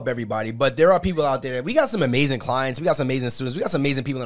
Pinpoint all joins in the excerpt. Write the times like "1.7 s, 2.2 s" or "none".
none